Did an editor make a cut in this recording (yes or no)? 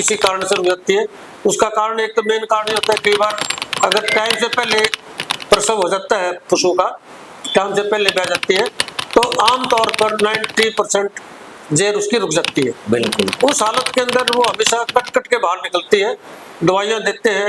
no